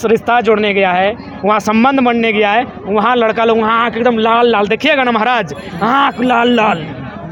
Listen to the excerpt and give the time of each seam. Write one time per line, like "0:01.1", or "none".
none